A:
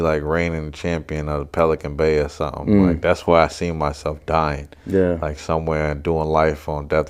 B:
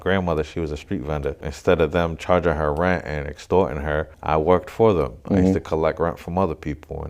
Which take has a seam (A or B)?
B